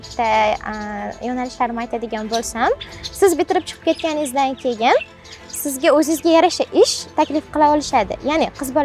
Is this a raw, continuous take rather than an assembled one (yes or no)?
yes